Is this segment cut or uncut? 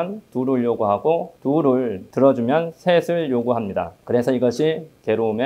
uncut